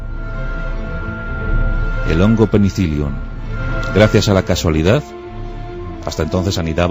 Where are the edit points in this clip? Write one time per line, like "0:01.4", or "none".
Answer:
0:03.9